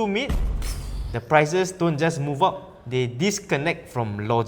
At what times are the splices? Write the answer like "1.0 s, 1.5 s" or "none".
none